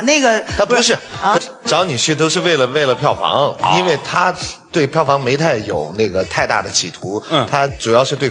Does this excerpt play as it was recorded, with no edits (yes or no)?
yes